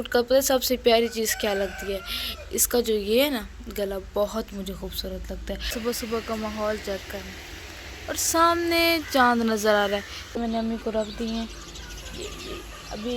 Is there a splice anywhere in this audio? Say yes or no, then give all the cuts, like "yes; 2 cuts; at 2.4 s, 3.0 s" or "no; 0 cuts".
yes; 2 cuts; at 5.7 s, 10.2 s